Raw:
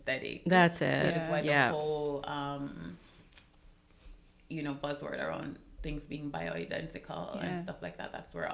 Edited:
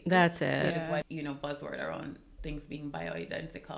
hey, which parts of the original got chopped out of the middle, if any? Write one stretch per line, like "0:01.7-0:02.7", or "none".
0:01.4-0:04.4